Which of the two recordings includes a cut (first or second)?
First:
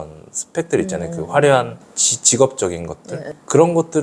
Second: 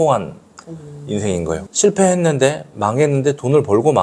second